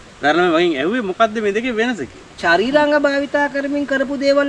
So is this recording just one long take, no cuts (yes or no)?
no